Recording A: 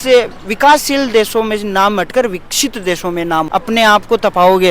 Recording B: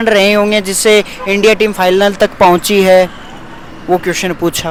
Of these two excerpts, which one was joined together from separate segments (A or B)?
A